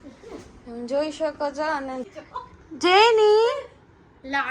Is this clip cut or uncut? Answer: cut